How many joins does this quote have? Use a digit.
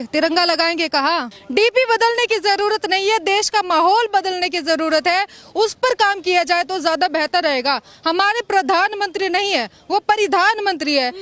1